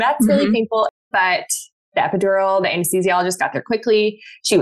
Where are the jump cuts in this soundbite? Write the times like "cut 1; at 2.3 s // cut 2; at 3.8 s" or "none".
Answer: cut 1; at 1.0 s